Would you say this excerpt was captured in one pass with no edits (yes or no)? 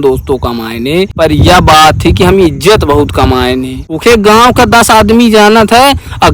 no